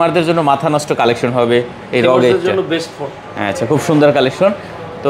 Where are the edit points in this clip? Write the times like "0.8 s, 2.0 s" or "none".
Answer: none